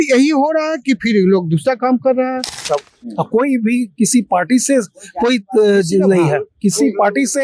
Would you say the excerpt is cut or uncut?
cut